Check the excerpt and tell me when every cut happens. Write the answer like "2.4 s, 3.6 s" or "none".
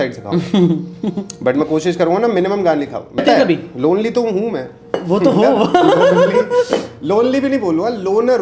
3.2 s